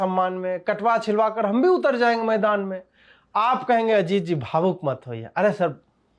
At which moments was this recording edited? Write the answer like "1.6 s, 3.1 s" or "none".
none